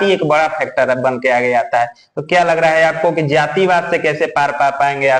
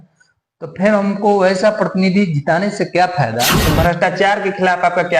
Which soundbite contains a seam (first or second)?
second